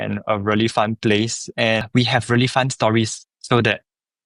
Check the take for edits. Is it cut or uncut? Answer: cut